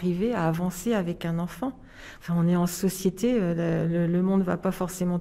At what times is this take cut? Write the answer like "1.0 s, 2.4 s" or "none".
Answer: none